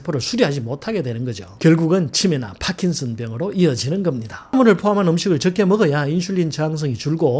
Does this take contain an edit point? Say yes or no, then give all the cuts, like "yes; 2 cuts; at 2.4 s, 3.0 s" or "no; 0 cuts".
yes; 1 cut; at 4.5 s